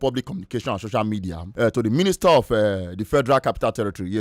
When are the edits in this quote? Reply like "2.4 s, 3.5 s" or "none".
1.4 s